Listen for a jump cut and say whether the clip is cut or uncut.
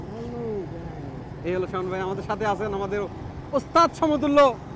uncut